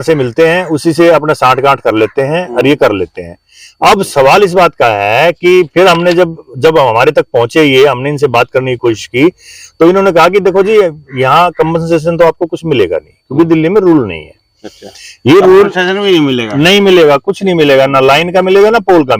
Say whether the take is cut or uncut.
uncut